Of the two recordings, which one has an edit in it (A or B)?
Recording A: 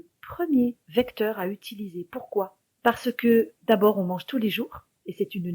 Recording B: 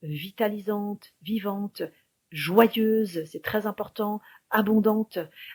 A